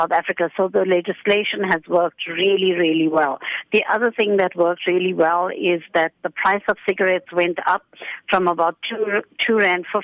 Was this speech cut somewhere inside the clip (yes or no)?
no